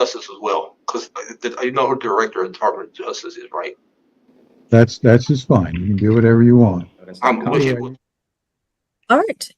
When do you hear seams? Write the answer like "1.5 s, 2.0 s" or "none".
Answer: 7.8 s